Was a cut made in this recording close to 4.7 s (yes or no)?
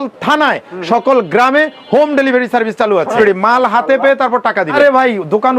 yes